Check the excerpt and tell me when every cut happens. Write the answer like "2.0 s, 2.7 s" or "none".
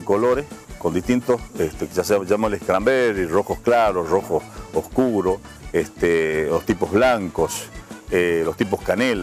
none